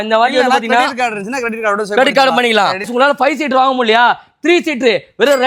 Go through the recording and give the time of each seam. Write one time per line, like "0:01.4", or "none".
0:02.9